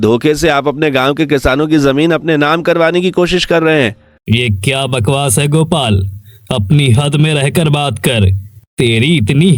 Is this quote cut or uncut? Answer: uncut